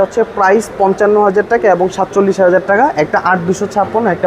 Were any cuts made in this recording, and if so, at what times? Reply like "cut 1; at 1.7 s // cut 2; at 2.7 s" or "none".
none